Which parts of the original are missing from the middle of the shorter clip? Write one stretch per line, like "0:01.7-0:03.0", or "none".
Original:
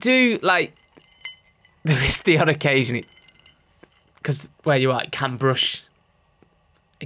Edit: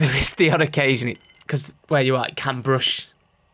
0:03.2-0:04.1